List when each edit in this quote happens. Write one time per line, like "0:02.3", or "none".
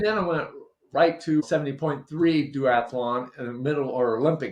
0:01.4